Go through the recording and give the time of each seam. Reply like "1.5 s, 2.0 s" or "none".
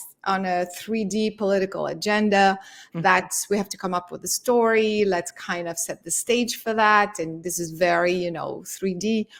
none